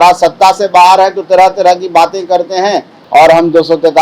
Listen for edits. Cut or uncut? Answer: cut